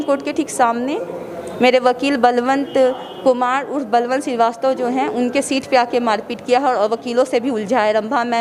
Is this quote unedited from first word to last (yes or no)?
yes